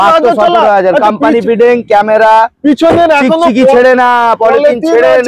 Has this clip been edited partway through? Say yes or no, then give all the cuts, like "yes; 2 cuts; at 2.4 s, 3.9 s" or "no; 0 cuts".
no; 0 cuts